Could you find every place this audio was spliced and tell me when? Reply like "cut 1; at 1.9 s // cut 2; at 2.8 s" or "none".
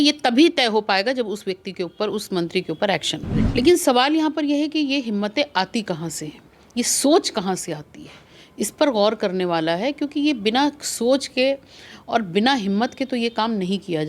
cut 1; at 3.4 s